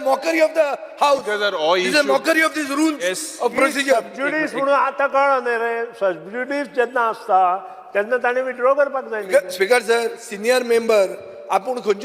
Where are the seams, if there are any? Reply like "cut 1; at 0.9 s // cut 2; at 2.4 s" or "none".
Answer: none